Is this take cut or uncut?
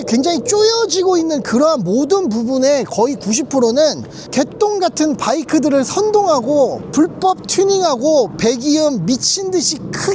uncut